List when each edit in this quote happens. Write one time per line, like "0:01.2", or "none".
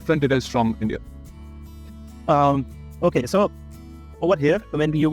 none